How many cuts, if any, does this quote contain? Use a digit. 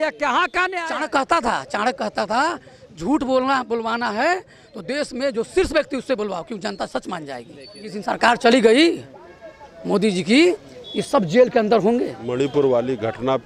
3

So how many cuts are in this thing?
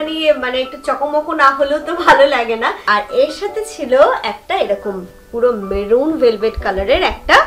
1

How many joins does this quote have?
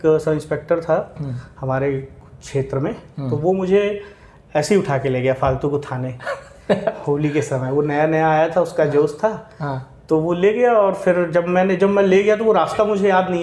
0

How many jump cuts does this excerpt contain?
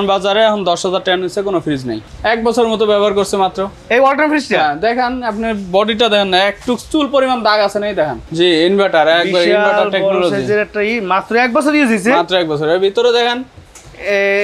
2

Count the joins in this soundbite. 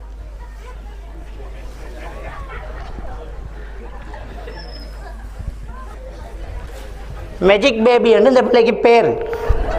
1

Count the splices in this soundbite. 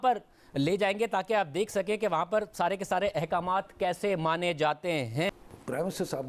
1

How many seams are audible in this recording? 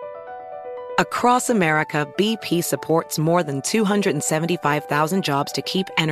1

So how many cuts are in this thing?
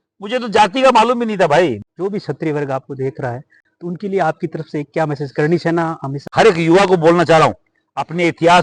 2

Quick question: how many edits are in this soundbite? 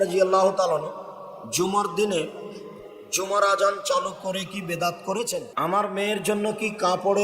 1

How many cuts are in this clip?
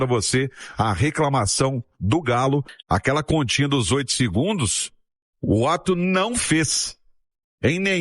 1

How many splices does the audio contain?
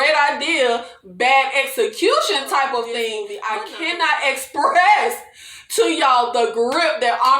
1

